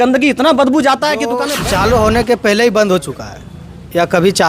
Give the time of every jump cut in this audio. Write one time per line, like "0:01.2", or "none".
0:01.5